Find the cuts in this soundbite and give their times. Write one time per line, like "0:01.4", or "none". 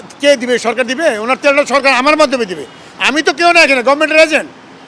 none